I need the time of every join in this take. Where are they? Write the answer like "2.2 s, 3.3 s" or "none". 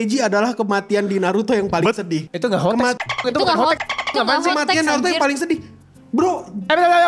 2.3 s